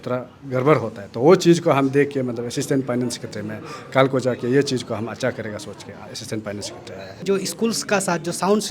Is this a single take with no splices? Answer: no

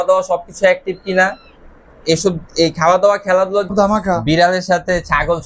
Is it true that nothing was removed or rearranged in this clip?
no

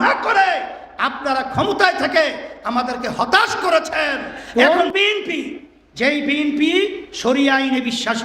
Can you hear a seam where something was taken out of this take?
yes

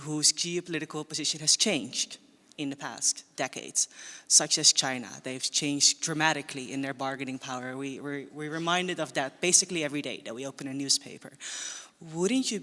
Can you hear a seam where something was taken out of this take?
no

